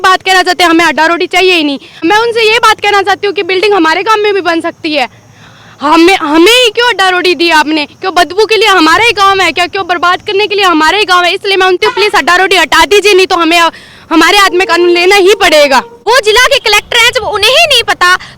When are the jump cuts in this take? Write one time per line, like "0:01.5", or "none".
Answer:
0:01.9
0:11.8
0:15.9